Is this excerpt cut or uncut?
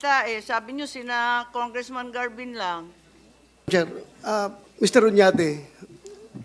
cut